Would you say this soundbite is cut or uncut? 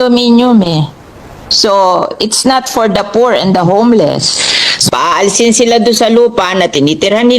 cut